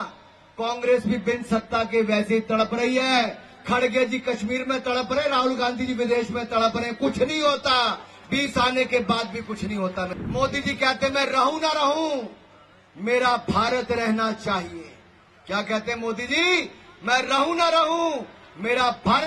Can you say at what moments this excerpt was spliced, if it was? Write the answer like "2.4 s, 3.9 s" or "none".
10.2 s